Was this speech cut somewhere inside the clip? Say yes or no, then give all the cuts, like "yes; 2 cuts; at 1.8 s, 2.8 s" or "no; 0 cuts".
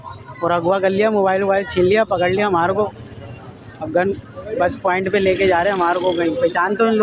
no; 0 cuts